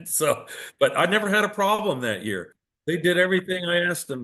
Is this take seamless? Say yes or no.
no